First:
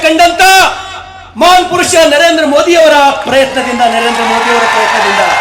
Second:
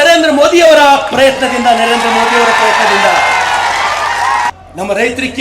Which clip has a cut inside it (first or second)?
second